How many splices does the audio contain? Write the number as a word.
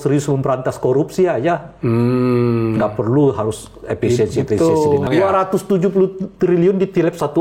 one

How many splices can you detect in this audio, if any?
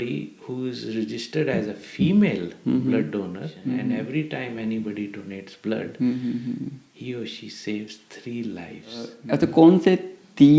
two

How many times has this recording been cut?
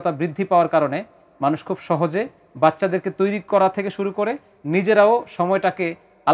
zero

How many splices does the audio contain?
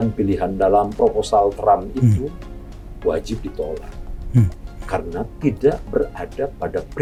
zero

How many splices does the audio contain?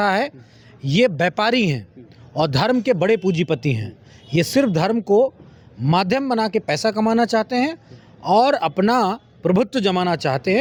zero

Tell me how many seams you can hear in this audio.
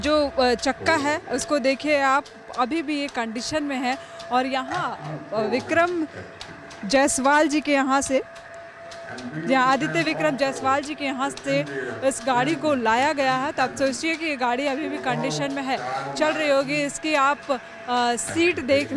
zero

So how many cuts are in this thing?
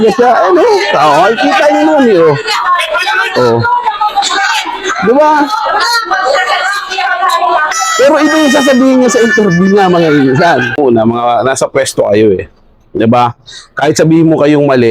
one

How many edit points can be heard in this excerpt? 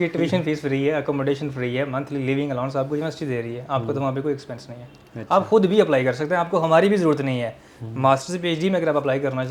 zero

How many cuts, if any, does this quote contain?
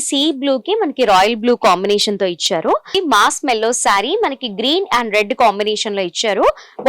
one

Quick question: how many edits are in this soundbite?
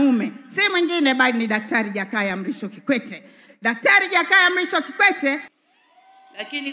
one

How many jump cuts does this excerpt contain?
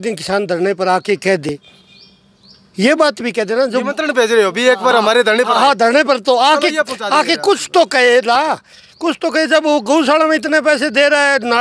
zero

